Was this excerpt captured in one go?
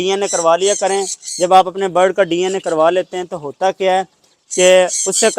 yes; 0 cuts

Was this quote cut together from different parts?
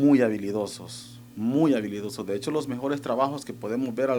no; 0 cuts

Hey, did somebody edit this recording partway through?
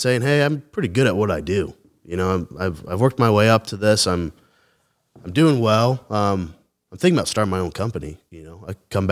no; 0 cuts

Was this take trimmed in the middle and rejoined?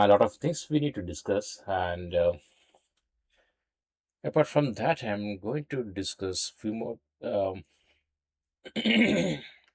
no; 0 cuts

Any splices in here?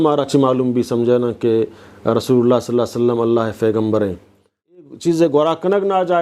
yes; 1 cut; at 4.8 s

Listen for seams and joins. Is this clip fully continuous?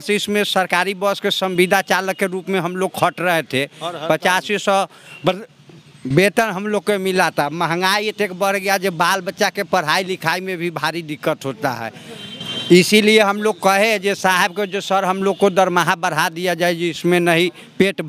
yes; 0 cuts

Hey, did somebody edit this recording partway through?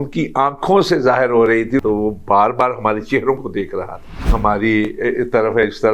yes; 2 cuts; at 1.8 s, 4.3 s

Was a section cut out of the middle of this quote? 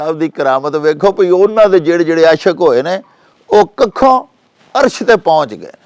no; 0 cuts

